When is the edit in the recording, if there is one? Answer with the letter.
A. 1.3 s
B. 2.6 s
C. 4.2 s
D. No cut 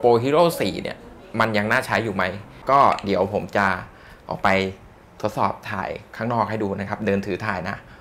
B